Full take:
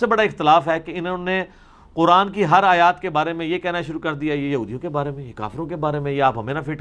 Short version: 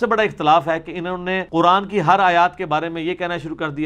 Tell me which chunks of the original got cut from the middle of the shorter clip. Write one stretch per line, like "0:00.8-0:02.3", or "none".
0:01.4-0:01.8